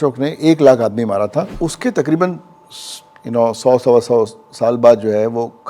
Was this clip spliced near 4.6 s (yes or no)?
no